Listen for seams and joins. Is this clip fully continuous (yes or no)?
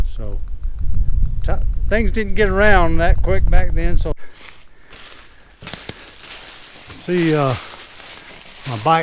no